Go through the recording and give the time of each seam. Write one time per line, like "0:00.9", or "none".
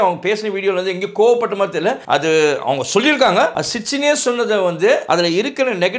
0:02.0
0:03.6
0:05.0